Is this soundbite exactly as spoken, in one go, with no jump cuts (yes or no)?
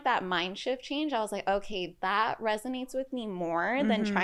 yes